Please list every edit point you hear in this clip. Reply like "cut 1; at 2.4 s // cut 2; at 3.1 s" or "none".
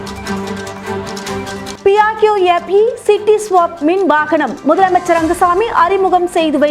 cut 1; at 1.7 s